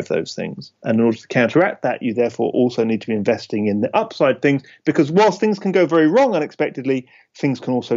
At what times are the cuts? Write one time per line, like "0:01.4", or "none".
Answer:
none